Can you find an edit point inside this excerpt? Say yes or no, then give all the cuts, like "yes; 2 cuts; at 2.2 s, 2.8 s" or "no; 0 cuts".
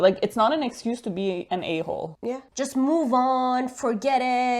yes; 1 cut; at 2.5 s